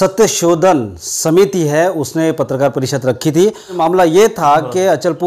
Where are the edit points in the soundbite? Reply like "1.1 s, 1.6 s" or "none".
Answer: 3.8 s